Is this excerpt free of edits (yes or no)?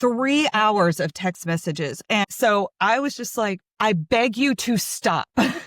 no